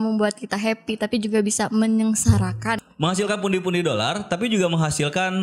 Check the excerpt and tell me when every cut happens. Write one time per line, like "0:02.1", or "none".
0:02.8